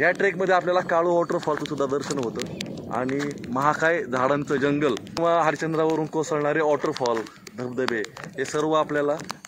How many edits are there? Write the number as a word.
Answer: one